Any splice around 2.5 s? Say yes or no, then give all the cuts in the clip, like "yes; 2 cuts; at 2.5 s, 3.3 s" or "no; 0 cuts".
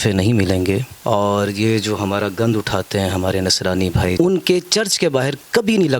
no; 2 cuts; at 0.9 s, 4.1 s